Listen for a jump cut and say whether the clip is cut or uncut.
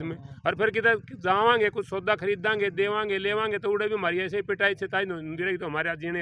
uncut